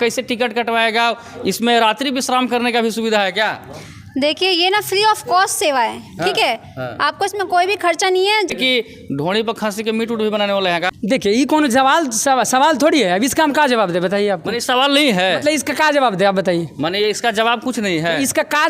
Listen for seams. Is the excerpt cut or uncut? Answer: cut